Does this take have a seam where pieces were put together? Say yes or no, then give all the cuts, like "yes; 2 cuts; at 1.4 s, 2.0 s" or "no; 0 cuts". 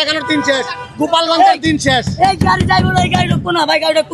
no; 0 cuts